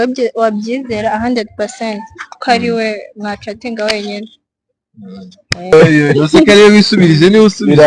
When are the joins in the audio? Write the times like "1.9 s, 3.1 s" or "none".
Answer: 5.7 s